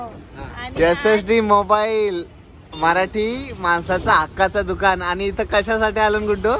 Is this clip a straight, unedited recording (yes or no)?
yes